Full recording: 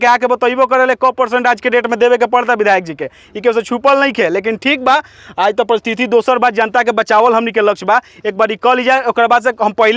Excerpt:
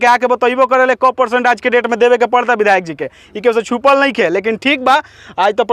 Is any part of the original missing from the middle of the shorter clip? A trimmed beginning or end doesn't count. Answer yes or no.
no